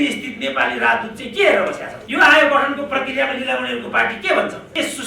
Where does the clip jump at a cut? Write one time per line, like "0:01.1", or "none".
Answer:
0:01.9